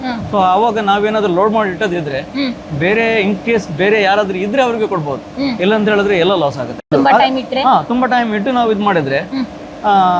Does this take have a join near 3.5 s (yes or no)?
no